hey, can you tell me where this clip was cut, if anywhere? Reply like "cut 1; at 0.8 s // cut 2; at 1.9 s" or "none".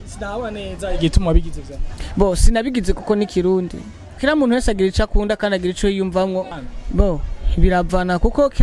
cut 1; at 4.2 s // cut 2; at 6.5 s